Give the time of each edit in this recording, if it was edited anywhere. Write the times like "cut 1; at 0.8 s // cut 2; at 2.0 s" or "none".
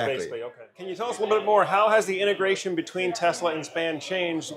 cut 1; at 1.0 s

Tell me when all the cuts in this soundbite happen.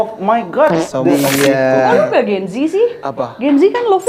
cut 1; at 1.1 s

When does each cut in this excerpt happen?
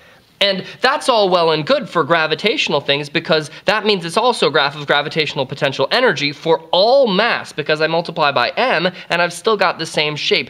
cut 1; at 8.1 s

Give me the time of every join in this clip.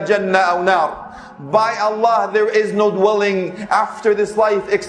none

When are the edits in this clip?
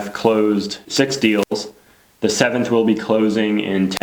none

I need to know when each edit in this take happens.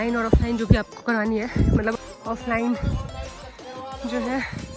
cut 1; at 1.9 s

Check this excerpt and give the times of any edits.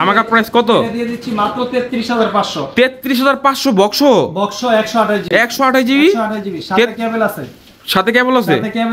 none

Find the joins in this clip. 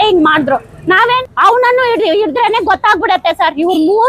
cut 1; at 1.2 s

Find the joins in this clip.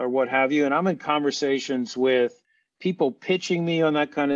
none

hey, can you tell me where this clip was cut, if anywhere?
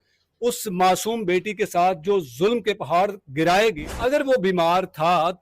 cut 1; at 3.8 s

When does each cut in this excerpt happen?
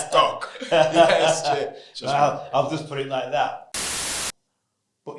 cut 1; at 4.2 s

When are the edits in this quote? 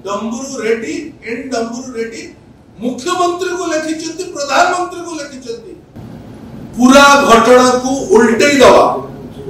cut 1; at 5.9 s

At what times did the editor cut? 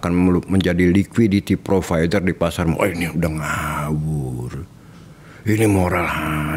none

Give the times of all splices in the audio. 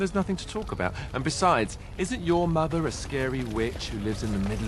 cut 1; at 1.0 s

